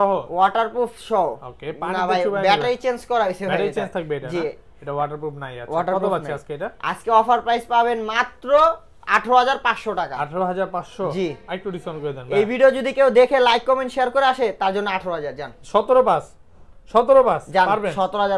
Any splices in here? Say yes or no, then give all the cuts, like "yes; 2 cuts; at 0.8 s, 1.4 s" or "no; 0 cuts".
no; 0 cuts